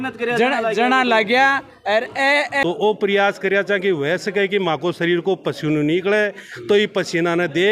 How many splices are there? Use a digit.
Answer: 1